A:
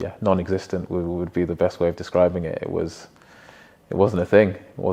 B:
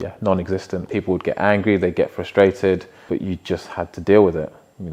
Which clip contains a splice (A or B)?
B